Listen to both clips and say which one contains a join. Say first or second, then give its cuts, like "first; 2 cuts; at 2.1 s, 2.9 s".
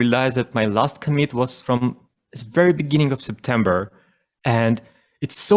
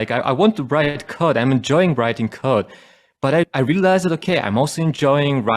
second; 1 cut; at 3.5 s